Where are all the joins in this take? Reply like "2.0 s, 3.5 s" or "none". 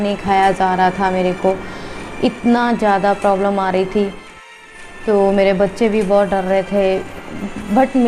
4.5 s